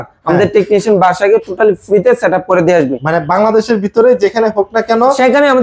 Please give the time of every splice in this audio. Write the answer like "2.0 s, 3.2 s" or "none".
none